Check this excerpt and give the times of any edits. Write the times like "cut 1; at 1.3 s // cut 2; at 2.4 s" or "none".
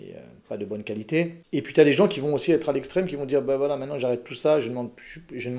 cut 1; at 1.4 s